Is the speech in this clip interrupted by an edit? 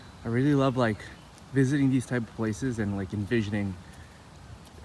no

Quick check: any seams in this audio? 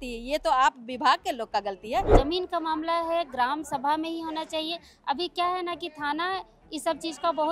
yes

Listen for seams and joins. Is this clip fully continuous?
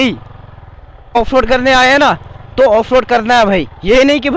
no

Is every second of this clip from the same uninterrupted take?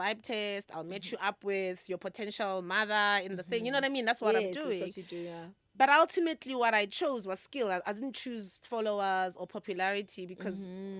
yes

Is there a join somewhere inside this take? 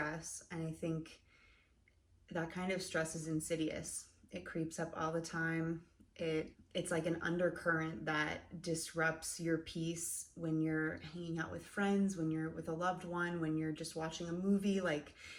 no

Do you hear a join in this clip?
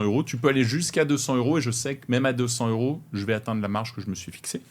no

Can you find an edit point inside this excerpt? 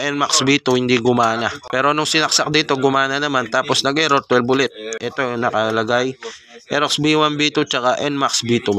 yes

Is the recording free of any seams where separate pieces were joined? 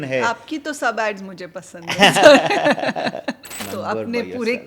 no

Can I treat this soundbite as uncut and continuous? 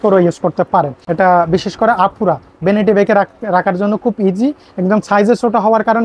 no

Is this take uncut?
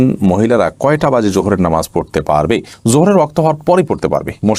yes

